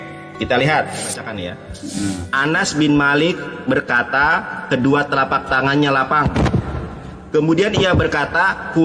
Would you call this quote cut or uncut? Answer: cut